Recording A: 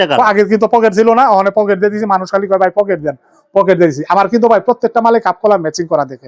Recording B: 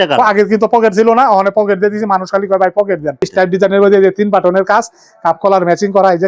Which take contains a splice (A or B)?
B